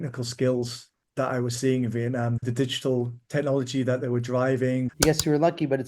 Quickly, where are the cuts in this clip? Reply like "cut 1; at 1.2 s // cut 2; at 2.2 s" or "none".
cut 1; at 2.4 s // cut 2; at 4.9 s